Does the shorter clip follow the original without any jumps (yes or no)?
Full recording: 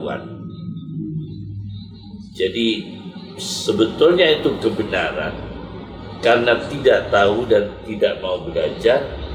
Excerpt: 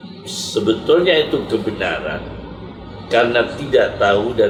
yes